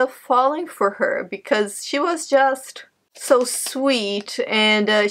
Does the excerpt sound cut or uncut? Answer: uncut